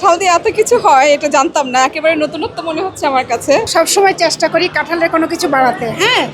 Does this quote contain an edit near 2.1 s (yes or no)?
no